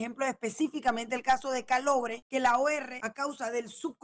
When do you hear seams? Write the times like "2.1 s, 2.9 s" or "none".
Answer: 2.2 s, 3.0 s